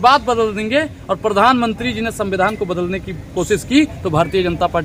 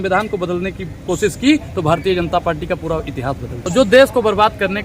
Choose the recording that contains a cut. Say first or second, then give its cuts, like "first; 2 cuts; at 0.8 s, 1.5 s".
second; 1 cut; at 3.6 s